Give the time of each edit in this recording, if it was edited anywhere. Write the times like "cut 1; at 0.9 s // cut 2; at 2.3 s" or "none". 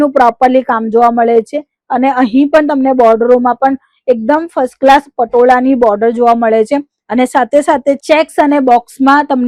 none